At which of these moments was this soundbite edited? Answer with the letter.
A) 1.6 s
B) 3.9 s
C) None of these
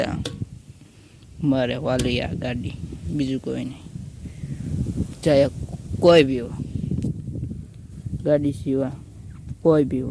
C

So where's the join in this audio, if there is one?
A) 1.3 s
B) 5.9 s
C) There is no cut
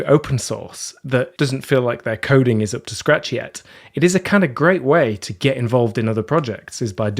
A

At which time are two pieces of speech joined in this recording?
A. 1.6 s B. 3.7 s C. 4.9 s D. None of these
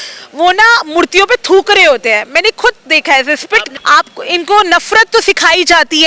B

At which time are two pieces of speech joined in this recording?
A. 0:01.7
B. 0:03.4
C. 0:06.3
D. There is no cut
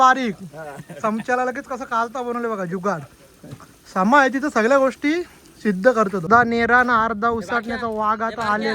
C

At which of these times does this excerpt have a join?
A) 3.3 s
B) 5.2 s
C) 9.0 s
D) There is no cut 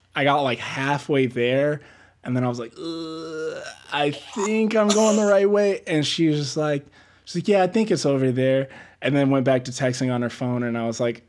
D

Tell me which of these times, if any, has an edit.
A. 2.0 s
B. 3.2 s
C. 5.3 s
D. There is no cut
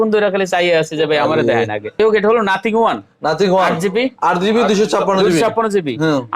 A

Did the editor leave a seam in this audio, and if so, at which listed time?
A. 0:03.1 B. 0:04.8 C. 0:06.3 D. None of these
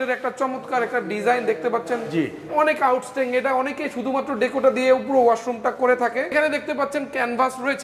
C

